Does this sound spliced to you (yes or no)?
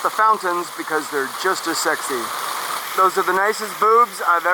yes